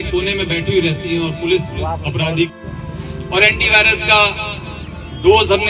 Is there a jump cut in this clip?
yes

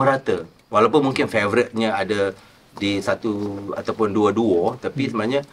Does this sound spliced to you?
no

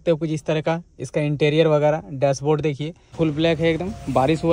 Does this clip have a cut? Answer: yes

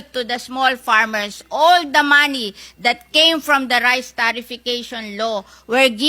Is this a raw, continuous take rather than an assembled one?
yes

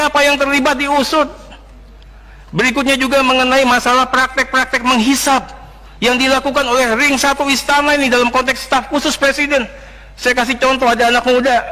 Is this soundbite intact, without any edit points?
yes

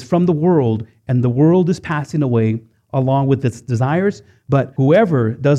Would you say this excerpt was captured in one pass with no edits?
no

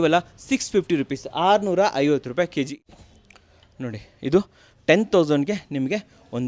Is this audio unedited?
no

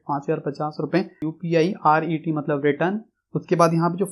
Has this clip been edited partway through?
yes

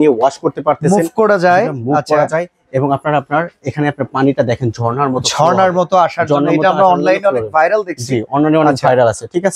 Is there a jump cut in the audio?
no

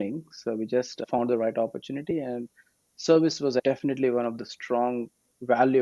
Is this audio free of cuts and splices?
no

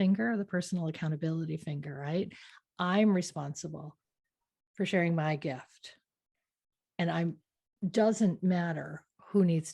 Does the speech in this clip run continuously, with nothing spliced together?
yes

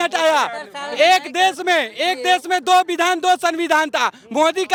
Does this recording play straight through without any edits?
yes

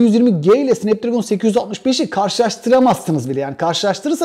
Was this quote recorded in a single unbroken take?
yes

